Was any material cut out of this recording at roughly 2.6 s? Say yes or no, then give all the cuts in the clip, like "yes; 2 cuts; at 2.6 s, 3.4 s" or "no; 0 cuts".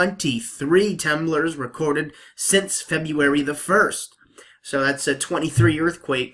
no; 0 cuts